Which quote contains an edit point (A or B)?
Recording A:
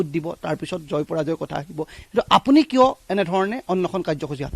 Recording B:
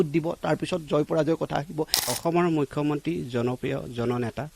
B